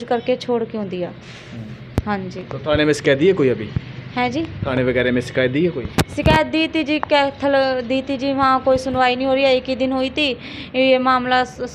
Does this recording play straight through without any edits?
yes; 0 cuts

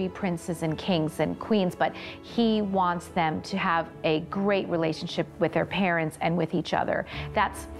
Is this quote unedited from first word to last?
no; 1 cut; at 5.3 s

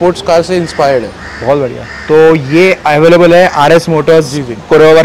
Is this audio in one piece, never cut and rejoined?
yes; 0 cuts

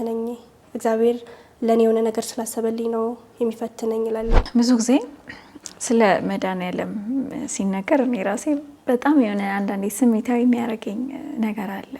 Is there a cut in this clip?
yes; 1 cut; at 4.4 s

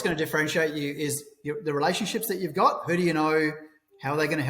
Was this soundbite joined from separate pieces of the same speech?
no; 0 cuts

